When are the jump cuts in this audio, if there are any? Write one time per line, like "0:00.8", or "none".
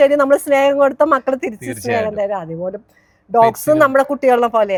none